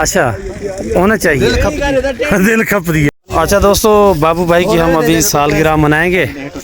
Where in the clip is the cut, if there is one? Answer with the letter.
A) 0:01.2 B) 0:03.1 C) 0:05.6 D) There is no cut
B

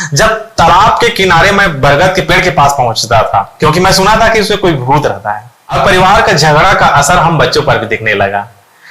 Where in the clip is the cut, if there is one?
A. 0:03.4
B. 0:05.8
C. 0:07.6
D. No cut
B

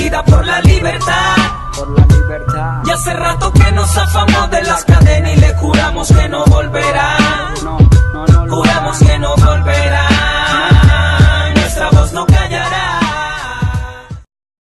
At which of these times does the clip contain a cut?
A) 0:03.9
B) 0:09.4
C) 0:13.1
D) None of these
C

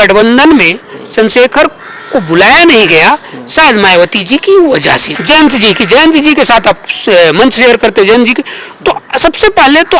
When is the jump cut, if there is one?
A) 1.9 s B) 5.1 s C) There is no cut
B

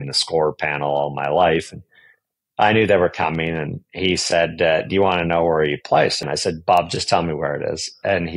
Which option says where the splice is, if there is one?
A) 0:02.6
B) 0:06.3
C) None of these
B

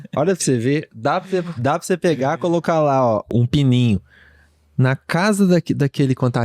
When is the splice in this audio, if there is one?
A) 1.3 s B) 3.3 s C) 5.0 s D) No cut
B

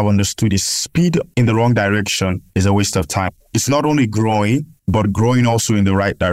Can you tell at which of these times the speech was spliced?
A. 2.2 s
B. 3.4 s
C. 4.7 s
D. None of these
B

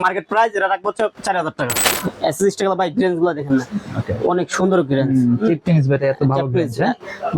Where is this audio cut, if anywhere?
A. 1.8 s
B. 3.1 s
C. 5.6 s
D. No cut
A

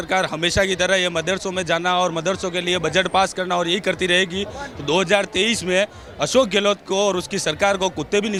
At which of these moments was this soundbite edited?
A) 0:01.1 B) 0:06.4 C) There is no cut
C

